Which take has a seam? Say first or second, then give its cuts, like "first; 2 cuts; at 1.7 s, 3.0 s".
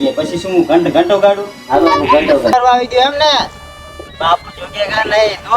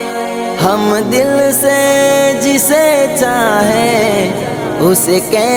first; 1 cut; at 2.5 s